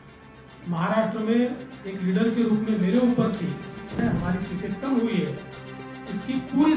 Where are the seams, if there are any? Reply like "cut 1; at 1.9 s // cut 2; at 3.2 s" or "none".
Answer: cut 1; at 4.0 s